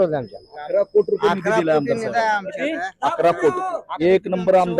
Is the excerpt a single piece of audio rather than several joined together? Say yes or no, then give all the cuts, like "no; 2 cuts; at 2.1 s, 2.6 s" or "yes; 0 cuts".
no; 1 cut; at 3.9 s